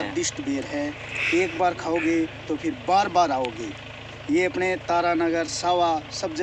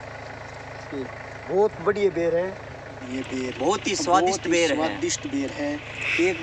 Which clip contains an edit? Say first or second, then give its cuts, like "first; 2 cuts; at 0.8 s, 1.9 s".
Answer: second; 1 cut; at 3.1 s